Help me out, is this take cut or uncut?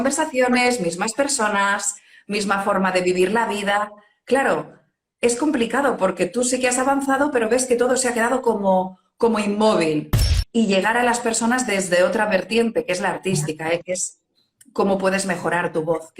cut